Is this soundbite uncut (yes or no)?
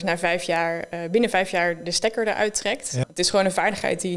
no